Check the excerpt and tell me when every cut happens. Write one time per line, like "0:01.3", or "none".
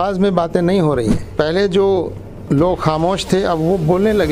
0:01.3